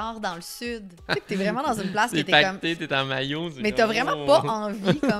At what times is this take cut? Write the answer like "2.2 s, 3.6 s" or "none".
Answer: 1.0 s